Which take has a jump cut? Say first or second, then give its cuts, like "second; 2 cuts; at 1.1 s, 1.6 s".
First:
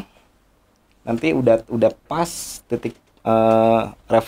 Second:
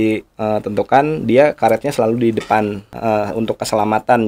second; 1 cut; at 2.9 s